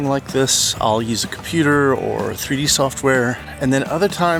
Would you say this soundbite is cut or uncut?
uncut